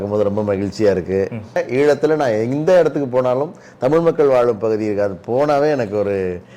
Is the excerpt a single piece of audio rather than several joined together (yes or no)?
no